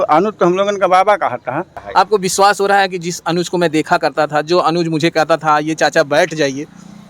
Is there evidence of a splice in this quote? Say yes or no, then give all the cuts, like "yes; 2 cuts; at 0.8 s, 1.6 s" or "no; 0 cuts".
yes; 1 cut; at 1.8 s